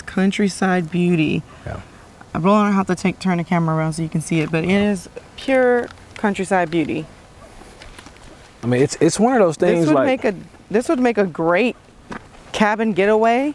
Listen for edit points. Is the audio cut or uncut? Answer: uncut